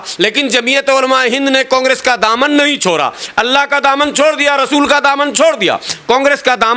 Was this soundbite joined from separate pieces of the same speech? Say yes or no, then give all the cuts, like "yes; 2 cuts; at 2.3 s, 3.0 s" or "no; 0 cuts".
no; 0 cuts